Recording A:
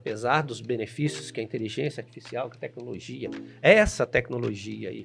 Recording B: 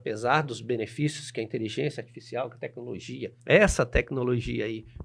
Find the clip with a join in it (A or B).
B